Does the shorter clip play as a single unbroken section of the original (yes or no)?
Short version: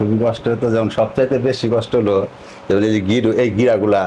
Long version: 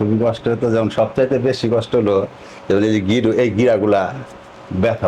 yes